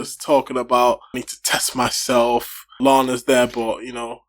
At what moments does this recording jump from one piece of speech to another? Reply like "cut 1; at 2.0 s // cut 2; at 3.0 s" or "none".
cut 1; at 1.3 s // cut 2; at 2.8 s